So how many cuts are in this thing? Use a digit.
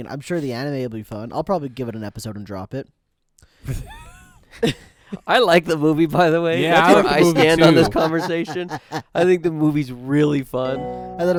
0